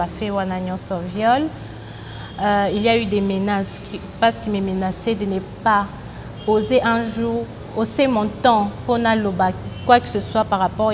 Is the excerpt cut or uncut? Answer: uncut